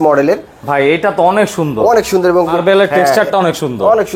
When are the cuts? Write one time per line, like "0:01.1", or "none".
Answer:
0:02.6